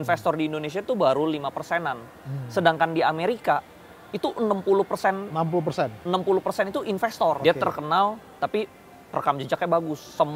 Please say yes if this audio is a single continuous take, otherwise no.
no